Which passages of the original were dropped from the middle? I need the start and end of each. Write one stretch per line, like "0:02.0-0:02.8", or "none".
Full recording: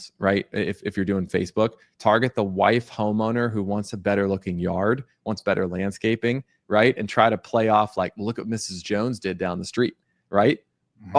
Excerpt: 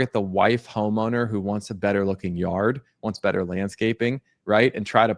none